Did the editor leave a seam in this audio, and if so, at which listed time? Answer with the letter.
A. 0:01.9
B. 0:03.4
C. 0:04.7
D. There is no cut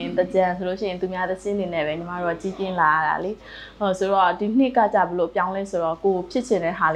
D